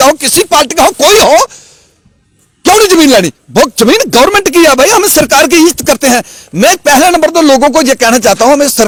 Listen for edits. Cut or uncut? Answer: uncut